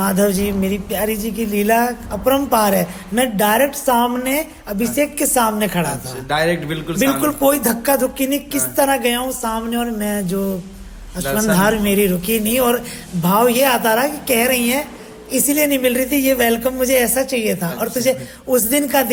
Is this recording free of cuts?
yes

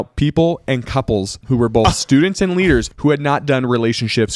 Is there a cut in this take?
yes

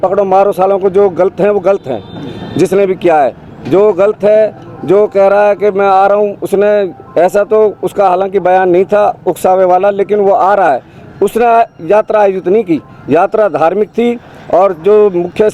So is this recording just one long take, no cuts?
yes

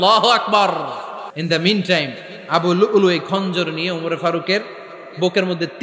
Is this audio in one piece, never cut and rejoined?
no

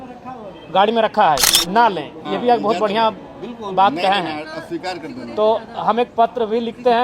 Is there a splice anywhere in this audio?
yes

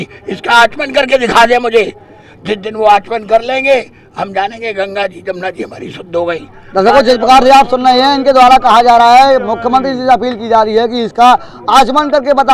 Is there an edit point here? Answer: no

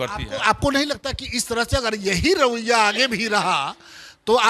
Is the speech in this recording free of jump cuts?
yes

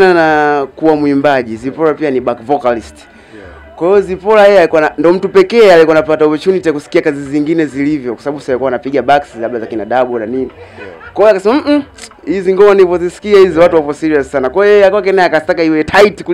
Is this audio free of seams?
yes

